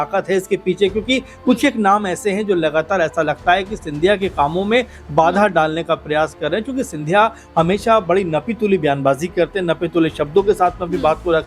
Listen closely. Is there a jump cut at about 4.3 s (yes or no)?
no